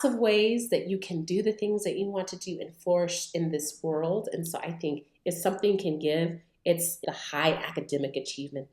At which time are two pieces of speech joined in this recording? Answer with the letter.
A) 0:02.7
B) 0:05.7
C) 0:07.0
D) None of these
C